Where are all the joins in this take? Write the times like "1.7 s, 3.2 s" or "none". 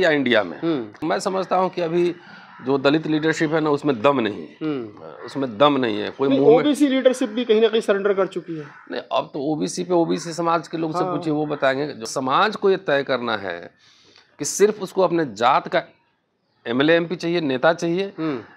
1.0 s, 12.1 s